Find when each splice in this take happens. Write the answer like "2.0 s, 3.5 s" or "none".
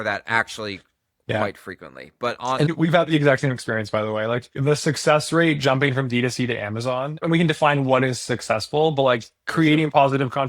2.7 s, 4.6 s, 7.2 s